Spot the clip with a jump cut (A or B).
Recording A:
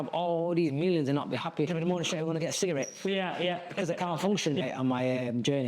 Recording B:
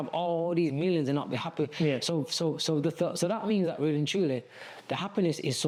A